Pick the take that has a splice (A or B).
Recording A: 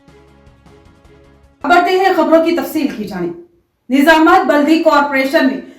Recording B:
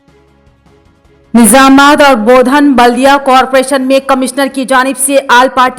B